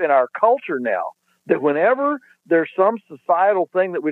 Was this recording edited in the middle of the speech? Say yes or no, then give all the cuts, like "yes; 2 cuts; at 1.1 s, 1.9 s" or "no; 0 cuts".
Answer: no; 0 cuts